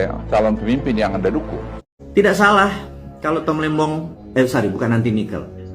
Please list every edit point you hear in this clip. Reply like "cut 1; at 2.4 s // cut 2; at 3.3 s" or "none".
cut 1; at 1.7 s // cut 2; at 4.2 s